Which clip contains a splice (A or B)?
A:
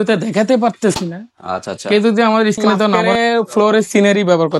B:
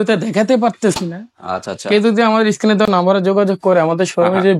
A